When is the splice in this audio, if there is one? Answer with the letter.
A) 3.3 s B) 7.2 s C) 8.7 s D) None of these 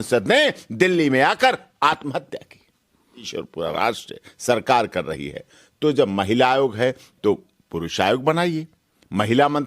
A